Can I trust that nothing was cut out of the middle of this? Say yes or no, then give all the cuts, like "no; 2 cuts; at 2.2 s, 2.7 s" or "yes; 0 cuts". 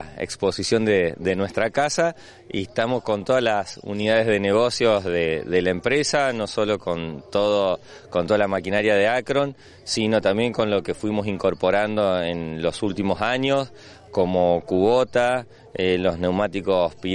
yes; 0 cuts